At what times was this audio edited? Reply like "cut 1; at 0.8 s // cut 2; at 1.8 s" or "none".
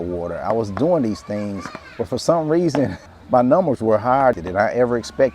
cut 1; at 3.0 s // cut 2; at 4.4 s